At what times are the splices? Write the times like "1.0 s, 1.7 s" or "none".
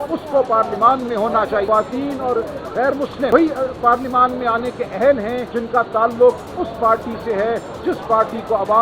1.7 s, 3.3 s, 5.5 s

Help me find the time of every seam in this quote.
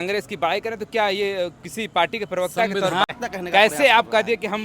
3.1 s

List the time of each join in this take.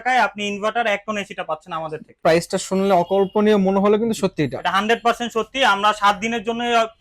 2.2 s

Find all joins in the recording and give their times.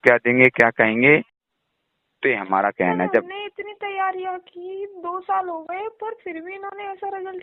1.4 s

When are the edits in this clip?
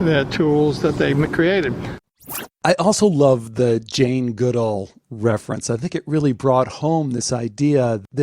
2.1 s

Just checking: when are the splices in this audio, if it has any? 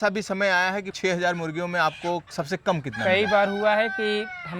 0.9 s

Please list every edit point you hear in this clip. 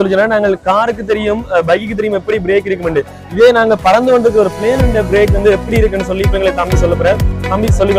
none

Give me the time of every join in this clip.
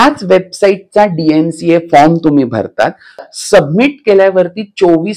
3.1 s

